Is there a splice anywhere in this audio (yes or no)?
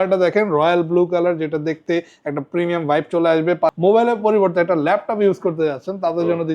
yes